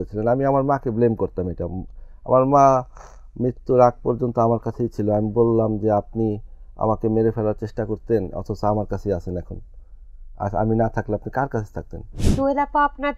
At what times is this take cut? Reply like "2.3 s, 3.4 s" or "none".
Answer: 12.1 s